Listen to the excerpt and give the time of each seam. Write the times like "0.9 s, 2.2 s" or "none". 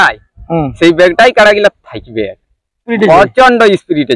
2.9 s